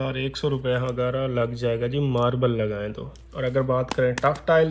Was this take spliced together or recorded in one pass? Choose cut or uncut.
uncut